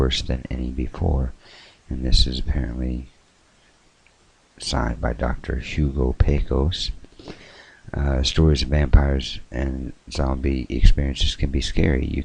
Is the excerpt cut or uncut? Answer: uncut